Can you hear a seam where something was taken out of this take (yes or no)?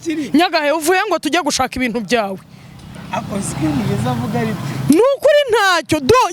no